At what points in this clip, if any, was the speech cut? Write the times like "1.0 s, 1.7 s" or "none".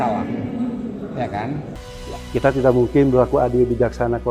1.7 s